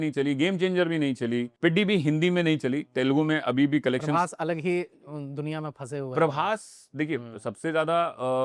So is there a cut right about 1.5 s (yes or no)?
yes